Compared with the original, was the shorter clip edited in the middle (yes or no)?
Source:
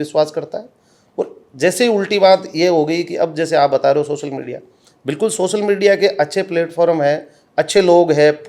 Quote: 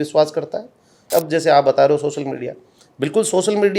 yes